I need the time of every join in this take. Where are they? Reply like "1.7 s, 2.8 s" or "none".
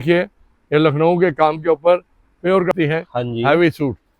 2.7 s